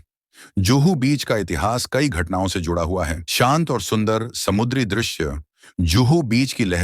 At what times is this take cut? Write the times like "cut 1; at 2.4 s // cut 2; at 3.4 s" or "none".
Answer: cut 1; at 3.2 s